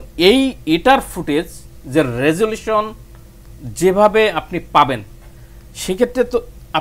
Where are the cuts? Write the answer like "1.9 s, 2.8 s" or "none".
none